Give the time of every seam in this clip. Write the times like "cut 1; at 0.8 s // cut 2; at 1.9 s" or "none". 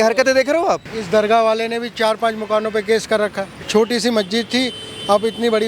cut 1; at 0.9 s // cut 2; at 3.5 s